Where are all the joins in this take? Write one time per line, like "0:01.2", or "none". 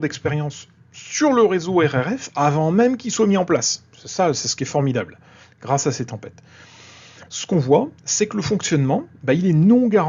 none